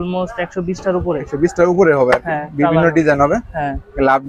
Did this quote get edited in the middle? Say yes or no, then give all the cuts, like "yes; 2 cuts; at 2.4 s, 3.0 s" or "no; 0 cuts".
no; 0 cuts